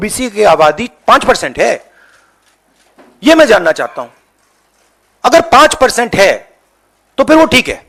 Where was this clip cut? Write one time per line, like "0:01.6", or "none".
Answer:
none